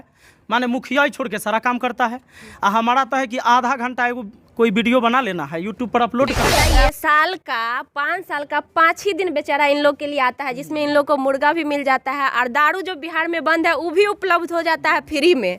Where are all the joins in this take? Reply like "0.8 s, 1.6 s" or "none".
6.4 s